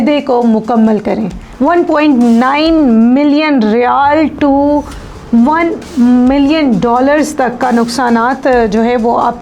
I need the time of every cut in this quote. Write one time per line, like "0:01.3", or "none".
0:01.5

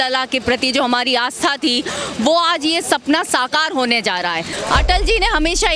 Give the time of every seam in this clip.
0:04.5

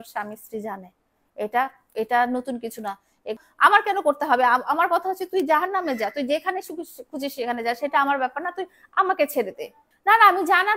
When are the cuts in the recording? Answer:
0:03.4
0:09.9

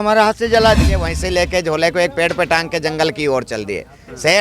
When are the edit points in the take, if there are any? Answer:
0:01.1

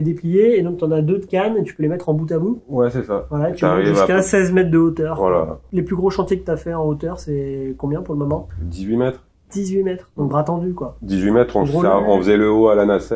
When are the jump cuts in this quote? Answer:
none

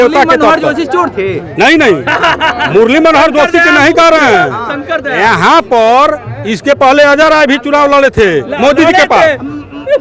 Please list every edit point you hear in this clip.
none

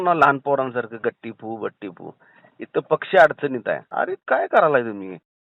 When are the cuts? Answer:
0:03.9

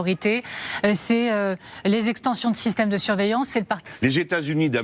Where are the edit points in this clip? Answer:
0:03.8

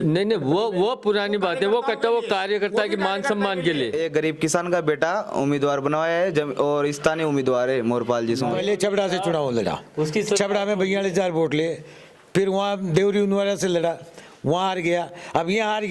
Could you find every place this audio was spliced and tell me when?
0:03.9
0:08.6

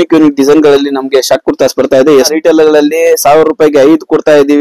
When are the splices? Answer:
0:02.3

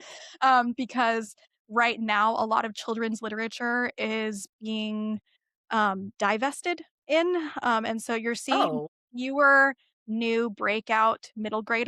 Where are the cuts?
none

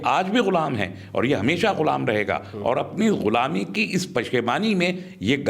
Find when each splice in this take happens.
none

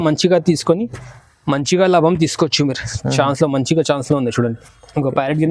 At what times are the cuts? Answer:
none

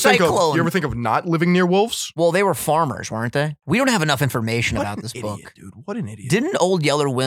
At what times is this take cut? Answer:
0:02.0
0:03.6

